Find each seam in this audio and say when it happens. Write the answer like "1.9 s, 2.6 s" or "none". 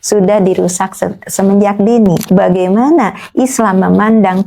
2.3 s